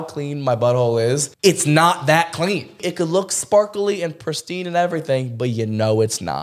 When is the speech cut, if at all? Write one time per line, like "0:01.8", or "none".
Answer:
0:01.3
0:02.8